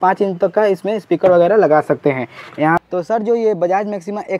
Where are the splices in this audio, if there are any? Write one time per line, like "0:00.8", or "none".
0:02.8